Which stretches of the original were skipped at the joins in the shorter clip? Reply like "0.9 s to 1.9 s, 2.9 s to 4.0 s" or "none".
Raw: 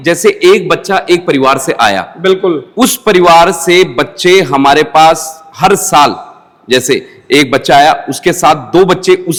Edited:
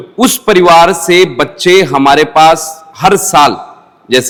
none